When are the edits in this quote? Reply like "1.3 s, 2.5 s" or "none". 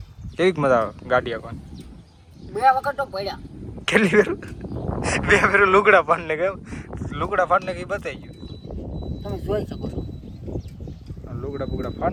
none